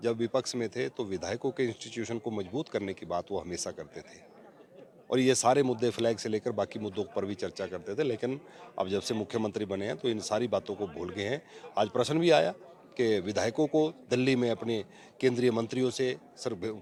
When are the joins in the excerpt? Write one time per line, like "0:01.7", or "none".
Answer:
none